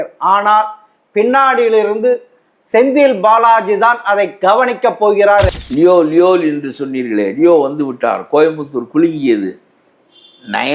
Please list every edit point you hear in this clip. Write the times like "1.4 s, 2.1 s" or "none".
5.6 s